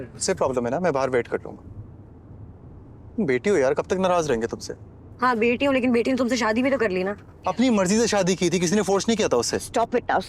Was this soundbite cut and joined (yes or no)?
no